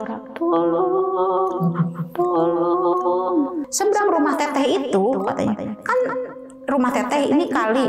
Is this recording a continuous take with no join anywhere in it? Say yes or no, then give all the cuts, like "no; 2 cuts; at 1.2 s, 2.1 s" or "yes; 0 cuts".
no; 1 cut; at 3.6 s